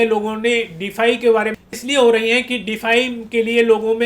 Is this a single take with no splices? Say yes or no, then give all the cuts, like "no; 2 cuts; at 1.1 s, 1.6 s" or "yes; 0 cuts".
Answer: no; 1 cut; at 1.6 s